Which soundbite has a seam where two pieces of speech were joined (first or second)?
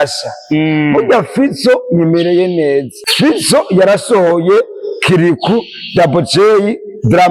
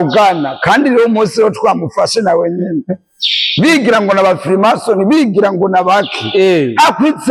first